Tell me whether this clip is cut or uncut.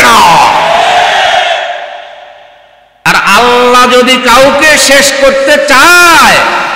cut